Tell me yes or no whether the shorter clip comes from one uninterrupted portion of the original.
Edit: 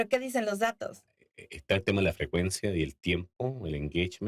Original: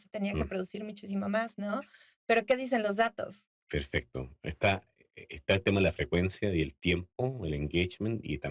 no